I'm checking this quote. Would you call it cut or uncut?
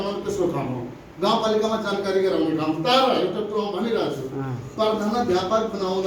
uncut